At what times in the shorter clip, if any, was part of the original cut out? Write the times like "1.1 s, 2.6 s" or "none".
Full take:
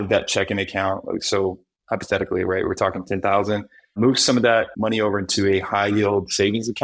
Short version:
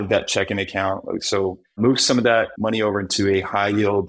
1.6 s